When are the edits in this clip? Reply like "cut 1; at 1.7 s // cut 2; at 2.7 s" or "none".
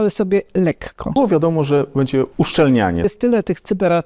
cut 1; at 1.1 s // cut 2; at 2.3 s // cut 3; at 3.0 s